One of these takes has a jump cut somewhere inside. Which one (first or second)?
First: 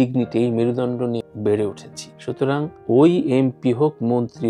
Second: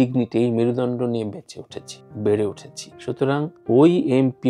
first